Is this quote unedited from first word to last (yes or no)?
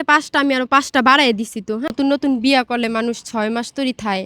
no